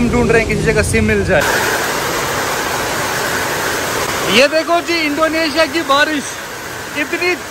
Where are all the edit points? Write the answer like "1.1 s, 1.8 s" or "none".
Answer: none